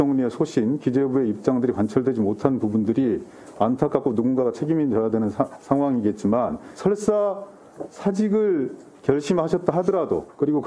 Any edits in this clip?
yes; 1 cut; at 6.7 s

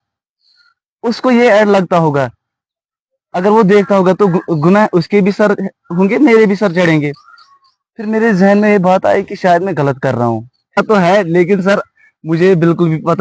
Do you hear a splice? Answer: yes; 1 cut; at 10.8 s

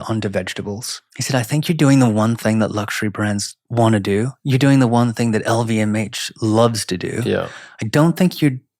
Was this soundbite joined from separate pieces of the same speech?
yes; 2 cuts; at 1.1 s, 3.6 s

